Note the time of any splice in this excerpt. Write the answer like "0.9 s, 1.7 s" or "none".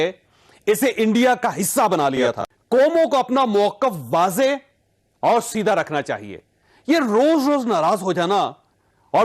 2.5 s